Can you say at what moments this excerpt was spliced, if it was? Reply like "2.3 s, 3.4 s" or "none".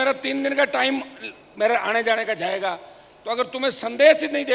none